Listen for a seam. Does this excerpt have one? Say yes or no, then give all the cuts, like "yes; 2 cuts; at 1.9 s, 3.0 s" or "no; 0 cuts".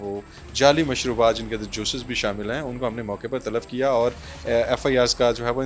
no; 0 cuts